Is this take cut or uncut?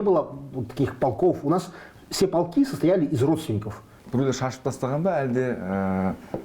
cut